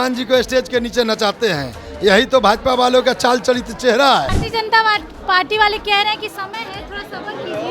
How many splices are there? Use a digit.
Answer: 1